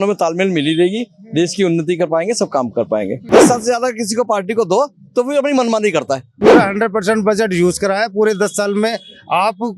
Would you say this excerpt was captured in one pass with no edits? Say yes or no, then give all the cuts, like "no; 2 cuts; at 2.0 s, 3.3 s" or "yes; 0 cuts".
no; 2 cuts; at 3.2 s, 6.3 s